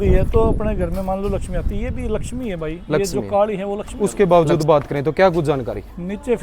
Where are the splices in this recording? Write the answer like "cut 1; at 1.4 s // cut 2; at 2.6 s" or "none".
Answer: cut 1; at 3.8 s